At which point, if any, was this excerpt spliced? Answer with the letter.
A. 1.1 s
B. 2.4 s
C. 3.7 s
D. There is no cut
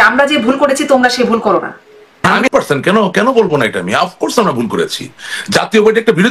B